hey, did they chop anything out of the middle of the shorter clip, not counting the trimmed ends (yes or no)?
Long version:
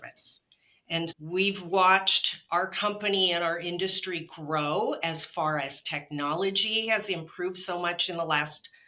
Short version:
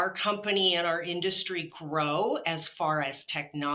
no